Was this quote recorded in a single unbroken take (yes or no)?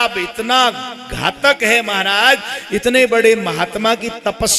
yes